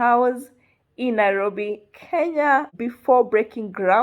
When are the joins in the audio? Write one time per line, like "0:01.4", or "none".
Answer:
0:02.7